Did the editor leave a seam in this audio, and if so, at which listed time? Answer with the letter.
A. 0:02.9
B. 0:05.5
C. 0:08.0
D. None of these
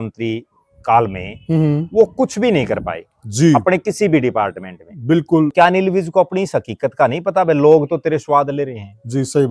B